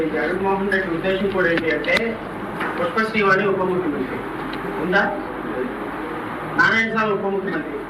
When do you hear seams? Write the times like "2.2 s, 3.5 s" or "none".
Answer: none